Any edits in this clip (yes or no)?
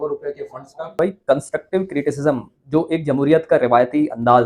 yes